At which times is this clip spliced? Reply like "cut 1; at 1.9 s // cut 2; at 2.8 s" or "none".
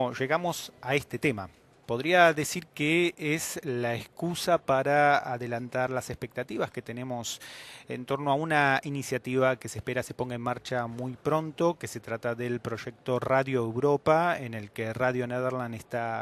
none

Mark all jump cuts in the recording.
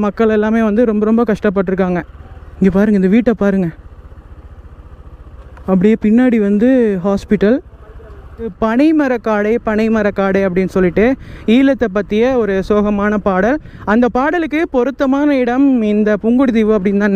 cut 1; at 2.2 s // cut 2; at 5.4 s // cut 3; at 8.5 s

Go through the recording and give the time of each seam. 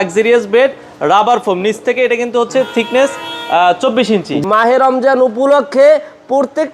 cut 1; at 4.4 s

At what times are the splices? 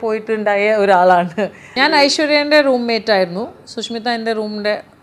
cut 1; at 2.0 s

